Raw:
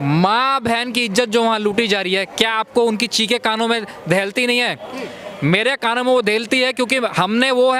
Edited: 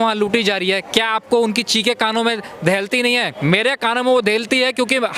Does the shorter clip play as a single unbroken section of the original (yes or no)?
no